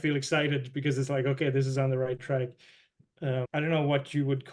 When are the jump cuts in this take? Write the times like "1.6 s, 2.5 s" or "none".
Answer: 3.0 s